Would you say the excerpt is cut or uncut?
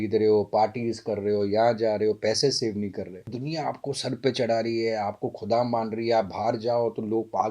cut